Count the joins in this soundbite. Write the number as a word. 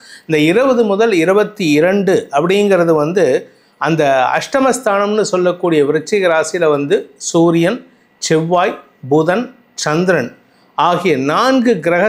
zero